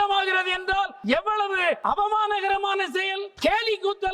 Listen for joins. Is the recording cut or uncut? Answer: cut